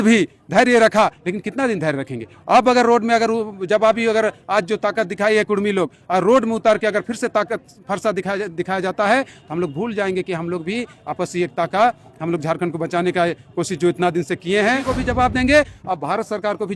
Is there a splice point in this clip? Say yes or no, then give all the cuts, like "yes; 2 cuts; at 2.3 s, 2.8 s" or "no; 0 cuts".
yes; 1 cut; at 14.9 s